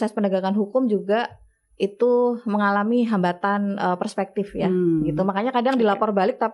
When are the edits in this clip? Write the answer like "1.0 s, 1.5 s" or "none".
none

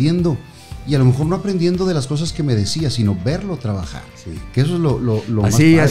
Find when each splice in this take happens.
none

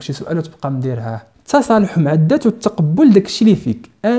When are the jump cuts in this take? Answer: 1.3 s

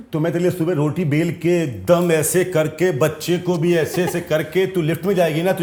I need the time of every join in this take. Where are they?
none

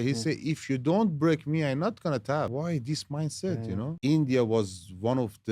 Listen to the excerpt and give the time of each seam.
2.5 s, 4.0 s

